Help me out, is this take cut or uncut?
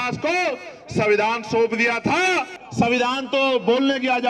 cut